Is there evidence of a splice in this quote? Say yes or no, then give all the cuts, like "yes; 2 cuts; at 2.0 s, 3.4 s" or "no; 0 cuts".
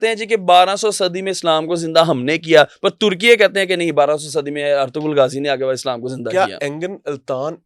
no; 0 cuts